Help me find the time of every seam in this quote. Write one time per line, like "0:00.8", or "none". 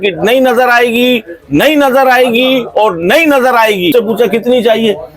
0:03.9